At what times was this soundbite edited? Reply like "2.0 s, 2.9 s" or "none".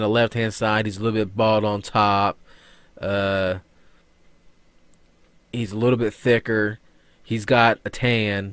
6.3 s